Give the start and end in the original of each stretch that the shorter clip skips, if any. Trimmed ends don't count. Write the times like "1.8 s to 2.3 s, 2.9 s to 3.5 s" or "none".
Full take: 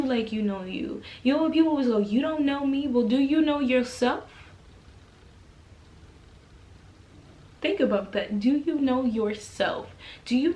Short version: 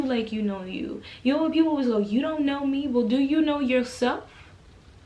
none